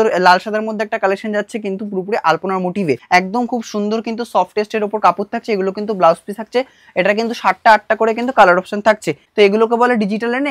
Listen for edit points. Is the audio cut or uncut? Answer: cut